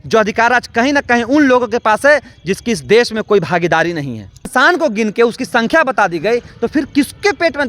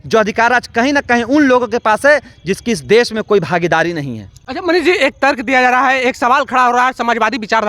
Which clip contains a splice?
first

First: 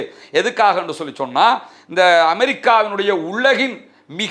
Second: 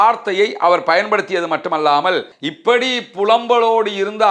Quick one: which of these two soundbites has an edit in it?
second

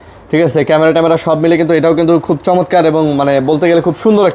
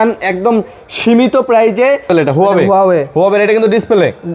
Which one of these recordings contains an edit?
second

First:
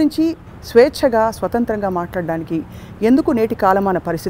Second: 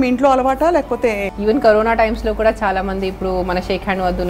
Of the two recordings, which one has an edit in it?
second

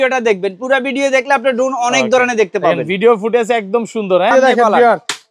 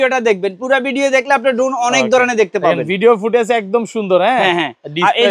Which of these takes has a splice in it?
first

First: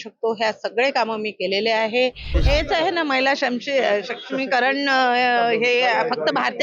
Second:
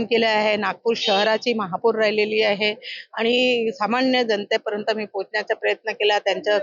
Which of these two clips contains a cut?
first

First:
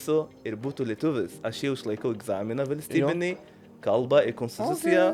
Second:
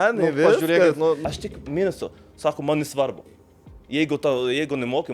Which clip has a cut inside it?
second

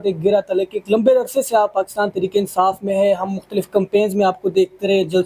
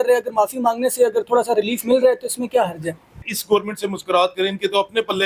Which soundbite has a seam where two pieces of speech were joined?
second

